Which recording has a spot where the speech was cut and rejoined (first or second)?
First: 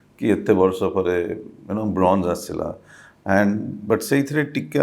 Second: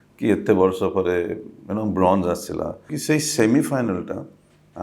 second